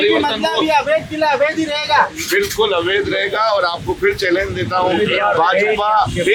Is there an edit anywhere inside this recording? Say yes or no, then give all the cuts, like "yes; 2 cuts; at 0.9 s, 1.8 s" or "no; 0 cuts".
no; 0 cuts